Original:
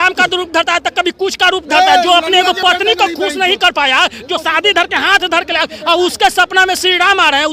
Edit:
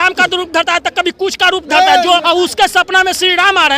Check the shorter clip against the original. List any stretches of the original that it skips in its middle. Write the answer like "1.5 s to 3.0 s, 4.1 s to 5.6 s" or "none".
2.2 s to 5.8 s